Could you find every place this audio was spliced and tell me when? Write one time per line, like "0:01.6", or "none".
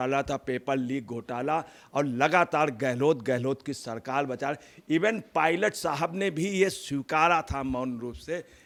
none